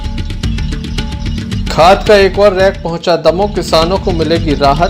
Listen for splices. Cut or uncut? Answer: cut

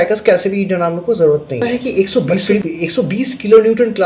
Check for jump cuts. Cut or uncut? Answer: cut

